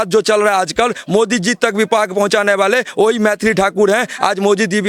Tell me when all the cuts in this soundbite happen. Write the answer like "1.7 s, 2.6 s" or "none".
none

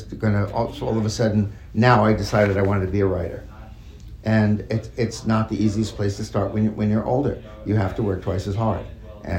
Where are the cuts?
none

